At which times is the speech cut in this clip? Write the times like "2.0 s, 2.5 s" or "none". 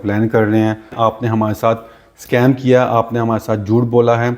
0.9 s